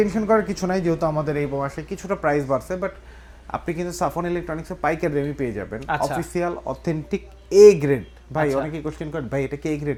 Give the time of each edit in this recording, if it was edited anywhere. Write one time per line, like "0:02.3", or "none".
none